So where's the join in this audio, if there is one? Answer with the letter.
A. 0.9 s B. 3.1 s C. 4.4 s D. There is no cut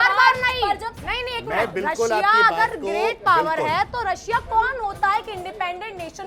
A